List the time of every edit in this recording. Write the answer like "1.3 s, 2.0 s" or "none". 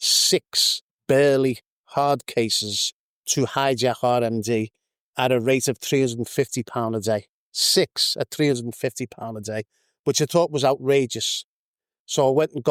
none